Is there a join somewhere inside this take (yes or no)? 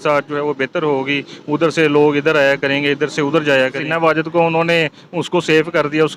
yes